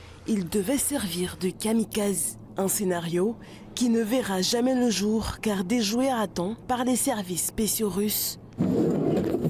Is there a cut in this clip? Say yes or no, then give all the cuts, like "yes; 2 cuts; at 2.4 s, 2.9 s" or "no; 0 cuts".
no; 0 cuts